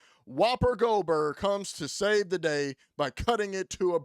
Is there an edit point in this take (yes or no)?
no